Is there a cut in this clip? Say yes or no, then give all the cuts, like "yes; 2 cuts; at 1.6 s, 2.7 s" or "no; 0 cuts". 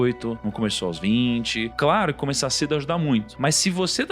yes; 2 cuts; at 1.7 s, 3.3 s